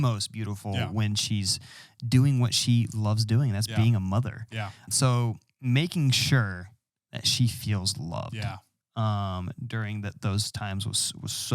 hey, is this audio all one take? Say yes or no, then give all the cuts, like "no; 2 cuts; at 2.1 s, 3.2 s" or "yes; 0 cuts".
no; 1 cut; at 4.9 s